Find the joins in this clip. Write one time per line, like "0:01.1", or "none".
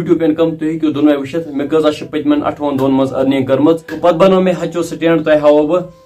0:03.9

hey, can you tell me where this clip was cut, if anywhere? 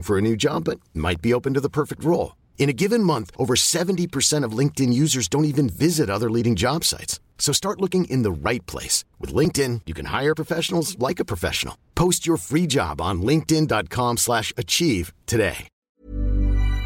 0:15.7

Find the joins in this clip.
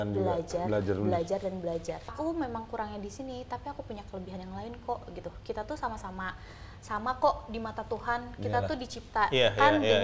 0:02.1

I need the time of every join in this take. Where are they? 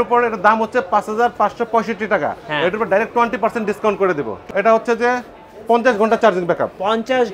0:04.4

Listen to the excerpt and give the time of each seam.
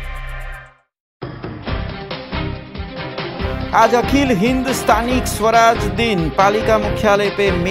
none

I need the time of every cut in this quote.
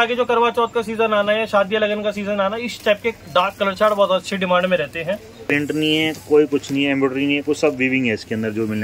0:05.5

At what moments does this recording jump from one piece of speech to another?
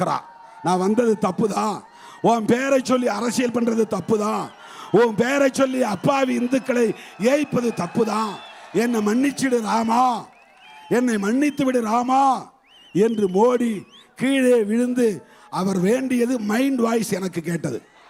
none

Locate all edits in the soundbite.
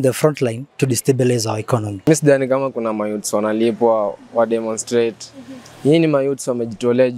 0:02.1

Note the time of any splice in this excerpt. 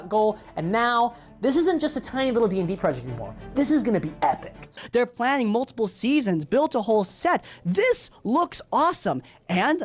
0:01.8

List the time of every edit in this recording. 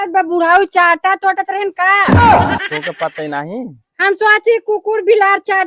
0:02.1
0:03.0

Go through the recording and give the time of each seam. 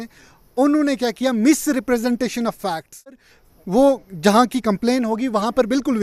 0:03.2

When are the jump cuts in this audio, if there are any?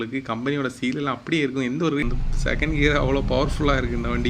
0:02.0

